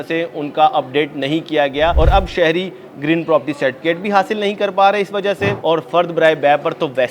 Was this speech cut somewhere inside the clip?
yes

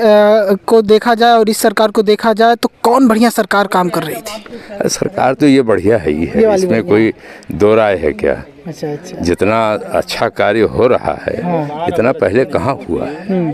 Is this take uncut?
yes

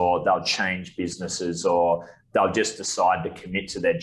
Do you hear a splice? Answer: no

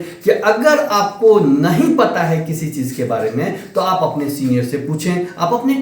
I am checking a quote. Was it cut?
no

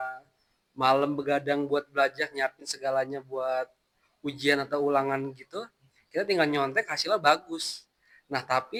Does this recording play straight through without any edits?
yes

